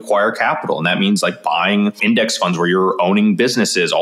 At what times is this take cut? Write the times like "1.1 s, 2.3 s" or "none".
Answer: 2.0 s